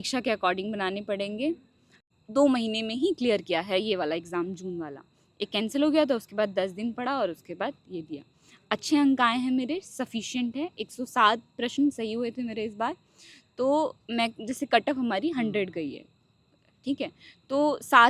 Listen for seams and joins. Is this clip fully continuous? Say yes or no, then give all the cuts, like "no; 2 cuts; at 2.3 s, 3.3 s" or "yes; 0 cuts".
no; 1 cut; at 2.0 s